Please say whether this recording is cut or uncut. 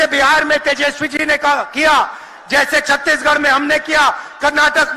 uncut